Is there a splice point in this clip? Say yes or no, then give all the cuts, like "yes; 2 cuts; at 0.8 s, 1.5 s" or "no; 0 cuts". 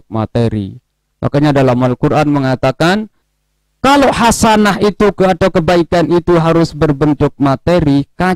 yes; 1 cut; at 3.2 s